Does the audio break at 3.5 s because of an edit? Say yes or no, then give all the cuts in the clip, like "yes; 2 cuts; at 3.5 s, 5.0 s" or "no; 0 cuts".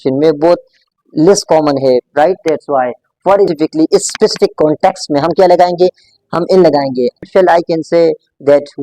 yes; 2 cuts; at 3.5 s, 7.3 s